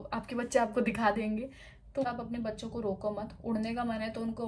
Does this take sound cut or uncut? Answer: cut